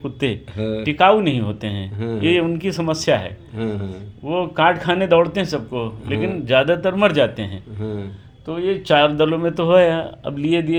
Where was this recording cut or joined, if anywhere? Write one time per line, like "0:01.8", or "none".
none

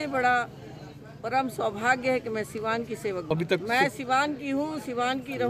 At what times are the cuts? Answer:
0:03.2

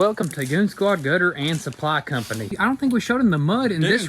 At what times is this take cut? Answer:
0:02.6

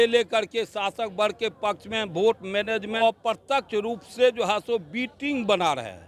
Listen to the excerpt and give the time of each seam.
0:03.0

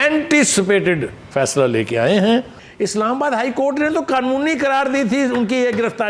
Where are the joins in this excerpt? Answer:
0:02.6

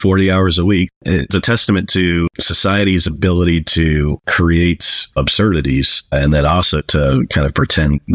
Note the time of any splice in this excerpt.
0:00.9
0:02.4
0:04.2

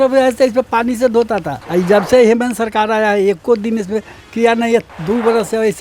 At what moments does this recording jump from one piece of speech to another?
0:01.6

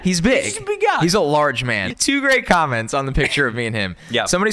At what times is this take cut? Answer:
0:01.8

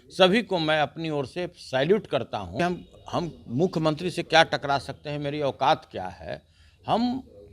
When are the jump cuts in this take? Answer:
0:02.6

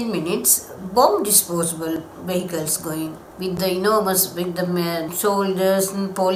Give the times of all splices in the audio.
0:03.2
0:05.1

